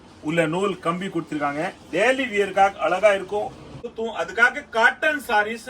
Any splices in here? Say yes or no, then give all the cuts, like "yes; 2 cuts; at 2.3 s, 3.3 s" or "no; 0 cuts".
yes; 1 cut; at 3.9 s